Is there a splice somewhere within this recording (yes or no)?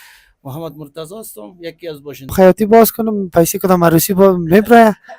yes